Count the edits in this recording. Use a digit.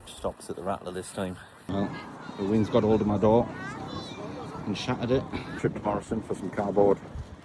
2